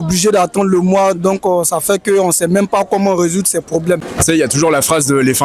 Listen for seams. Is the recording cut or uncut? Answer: cut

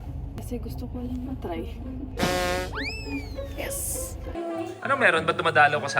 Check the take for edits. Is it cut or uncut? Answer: cut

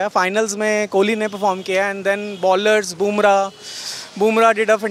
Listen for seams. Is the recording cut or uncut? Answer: uncut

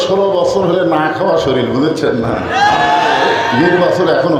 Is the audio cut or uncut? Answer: cut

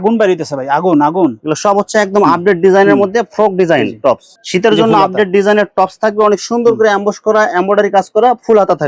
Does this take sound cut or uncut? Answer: cut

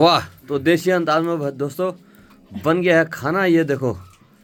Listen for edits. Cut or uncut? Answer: uncut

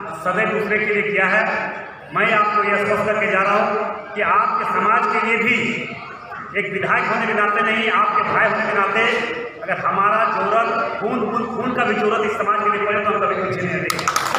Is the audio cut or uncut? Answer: uncut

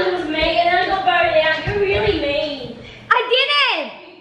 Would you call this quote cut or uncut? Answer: uncut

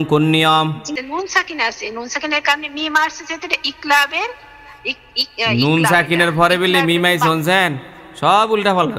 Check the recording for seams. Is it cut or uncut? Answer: cut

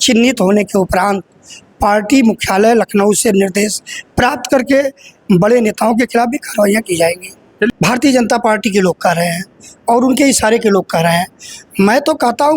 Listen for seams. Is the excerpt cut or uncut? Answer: cut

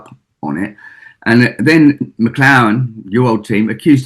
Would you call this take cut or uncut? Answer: cut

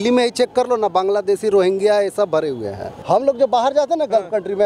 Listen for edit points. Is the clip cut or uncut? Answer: cut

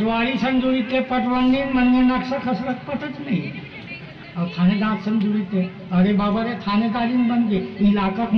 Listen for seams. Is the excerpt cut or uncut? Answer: uncut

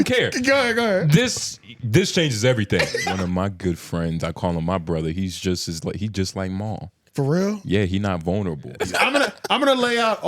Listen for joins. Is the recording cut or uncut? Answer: cut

